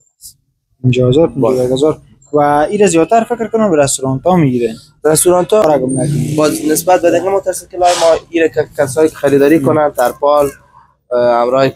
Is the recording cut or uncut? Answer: cut